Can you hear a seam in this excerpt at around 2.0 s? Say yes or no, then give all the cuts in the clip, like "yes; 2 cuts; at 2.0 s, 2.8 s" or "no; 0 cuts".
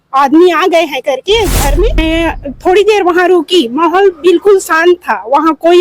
yes; 1 cut; at 2.0 s